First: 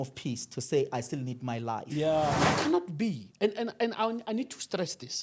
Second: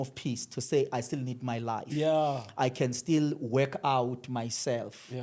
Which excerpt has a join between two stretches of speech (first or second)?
first